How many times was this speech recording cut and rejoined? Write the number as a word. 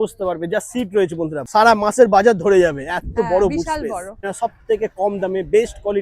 two